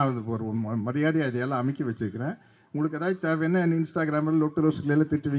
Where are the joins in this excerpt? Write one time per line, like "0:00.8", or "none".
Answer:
none